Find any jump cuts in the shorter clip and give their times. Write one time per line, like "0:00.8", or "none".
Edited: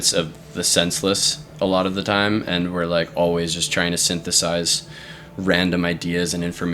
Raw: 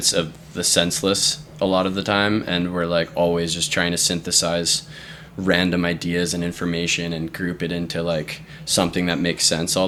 none